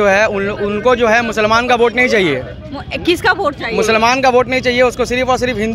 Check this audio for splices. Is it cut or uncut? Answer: uncut